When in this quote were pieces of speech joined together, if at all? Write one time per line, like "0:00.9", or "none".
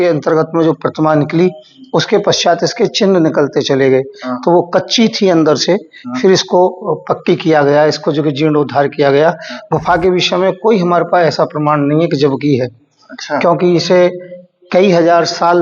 none